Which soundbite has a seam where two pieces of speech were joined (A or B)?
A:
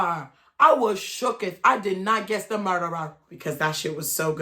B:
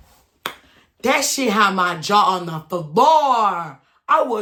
A